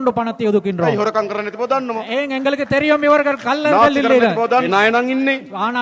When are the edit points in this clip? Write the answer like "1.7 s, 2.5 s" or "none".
4.7 s

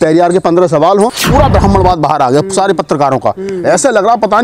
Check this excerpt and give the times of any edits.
1.2 s

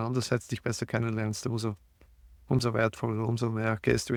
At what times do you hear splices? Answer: none

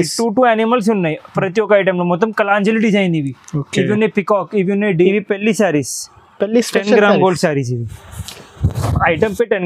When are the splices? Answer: 5.0 s

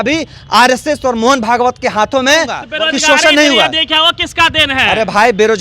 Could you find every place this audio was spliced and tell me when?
2.7 s

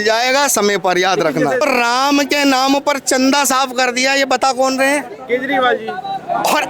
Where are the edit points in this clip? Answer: 1.6 s

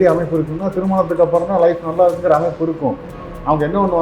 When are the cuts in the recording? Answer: none

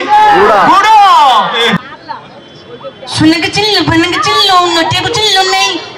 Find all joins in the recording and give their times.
1.8 s

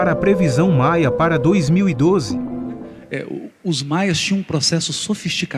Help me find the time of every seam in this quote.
4.5 s

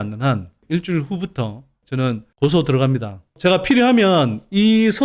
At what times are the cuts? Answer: 3.3 s

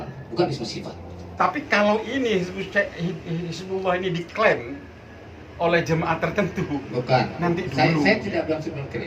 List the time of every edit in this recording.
1.3 s

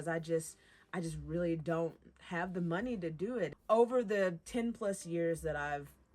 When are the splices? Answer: 3.6 s, 4.4 s

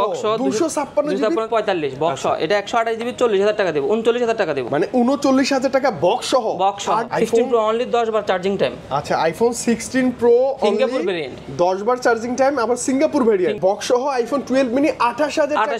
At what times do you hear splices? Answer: 1.5 s, 7.0 s, 13.6 s

